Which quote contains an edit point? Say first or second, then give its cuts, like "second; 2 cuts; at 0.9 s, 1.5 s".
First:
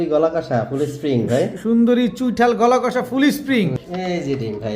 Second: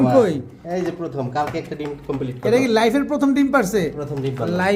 first; 1 cut; at 3.8 s